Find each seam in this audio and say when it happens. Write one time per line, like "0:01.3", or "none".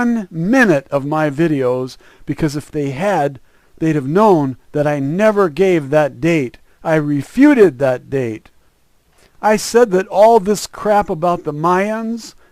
0:08.3